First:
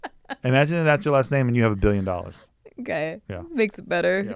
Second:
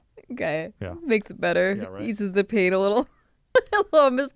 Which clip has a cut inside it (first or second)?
second